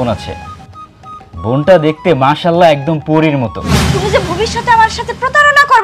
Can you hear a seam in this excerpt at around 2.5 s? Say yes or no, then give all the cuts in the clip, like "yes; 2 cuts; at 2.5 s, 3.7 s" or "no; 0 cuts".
no; 1 cut; at 3.8 s